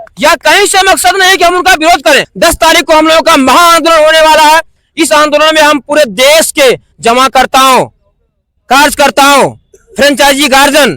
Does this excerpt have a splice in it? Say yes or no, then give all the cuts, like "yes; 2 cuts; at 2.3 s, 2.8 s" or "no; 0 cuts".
yes; 1 cut; at 2.3 s